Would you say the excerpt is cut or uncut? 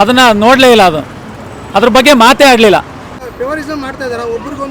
cut